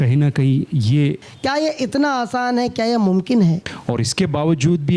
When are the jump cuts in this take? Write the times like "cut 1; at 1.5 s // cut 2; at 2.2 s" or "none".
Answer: cut 1; at 1.3 s // cut 2; at 3.7 s